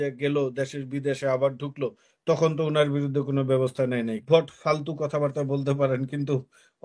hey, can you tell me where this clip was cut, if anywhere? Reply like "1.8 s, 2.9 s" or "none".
4.2 s